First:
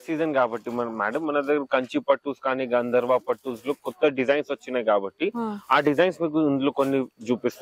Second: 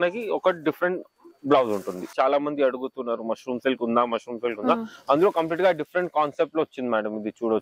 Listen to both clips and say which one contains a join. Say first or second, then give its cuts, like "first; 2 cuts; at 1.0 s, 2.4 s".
second; 1 cut; at 2.0 s